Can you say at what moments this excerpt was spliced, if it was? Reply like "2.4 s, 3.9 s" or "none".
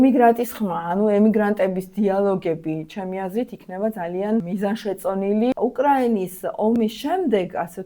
4.5 s, 5.5 s